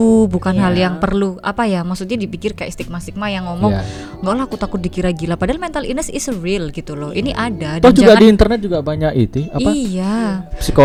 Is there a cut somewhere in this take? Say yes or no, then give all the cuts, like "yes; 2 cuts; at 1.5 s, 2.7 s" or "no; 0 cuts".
no; 0 cuts